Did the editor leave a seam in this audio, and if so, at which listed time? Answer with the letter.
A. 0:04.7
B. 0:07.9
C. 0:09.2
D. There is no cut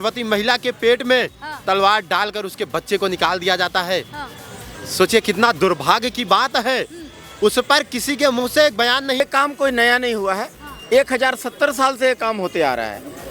C